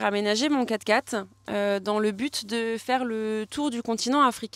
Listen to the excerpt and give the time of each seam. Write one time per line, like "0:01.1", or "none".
none